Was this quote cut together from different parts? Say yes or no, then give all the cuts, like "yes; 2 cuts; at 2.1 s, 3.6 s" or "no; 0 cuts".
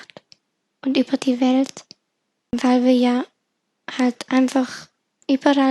yes; 1 cut; at 2.5 s